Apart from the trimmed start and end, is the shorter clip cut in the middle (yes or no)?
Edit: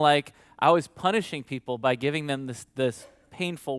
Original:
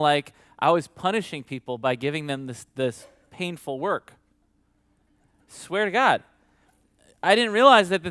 no